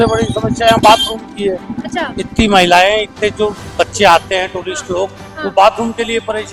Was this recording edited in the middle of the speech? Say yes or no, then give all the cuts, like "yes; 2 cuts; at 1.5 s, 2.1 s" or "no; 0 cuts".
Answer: no; 0 cuts